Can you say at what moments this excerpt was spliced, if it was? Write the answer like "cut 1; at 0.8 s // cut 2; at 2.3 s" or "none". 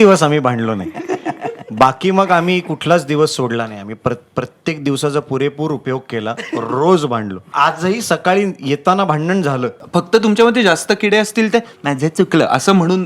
cut 1; at 7.5 s // cut 2; at 9.7 s